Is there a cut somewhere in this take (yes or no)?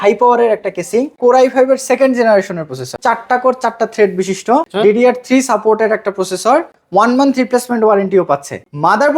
yes